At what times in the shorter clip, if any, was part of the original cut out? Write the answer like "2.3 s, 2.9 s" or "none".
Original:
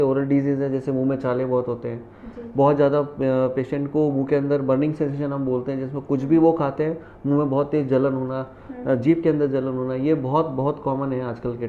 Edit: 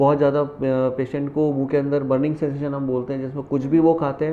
none